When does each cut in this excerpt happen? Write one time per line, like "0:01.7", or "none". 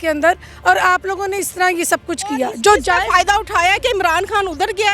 none